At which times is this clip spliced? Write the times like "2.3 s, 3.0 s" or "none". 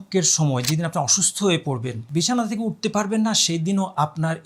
2.0 s